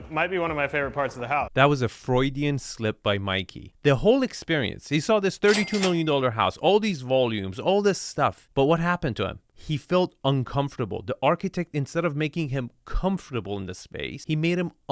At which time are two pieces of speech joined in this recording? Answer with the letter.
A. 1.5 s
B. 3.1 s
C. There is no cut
A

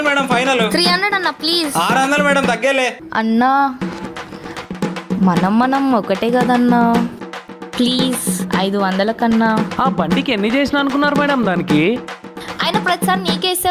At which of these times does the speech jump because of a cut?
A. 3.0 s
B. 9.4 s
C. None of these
A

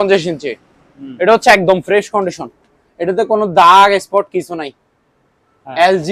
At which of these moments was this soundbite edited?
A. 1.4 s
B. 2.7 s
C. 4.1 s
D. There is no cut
D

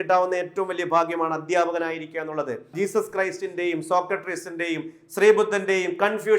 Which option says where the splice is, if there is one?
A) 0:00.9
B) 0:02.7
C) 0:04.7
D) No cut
B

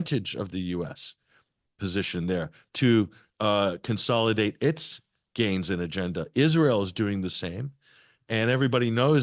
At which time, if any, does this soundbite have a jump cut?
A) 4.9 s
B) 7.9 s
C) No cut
C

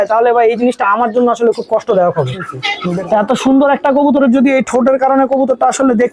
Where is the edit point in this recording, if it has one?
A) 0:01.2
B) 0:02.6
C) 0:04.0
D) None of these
B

